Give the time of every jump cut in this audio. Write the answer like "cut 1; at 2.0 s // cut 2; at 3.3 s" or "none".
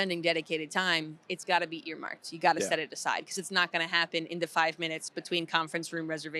none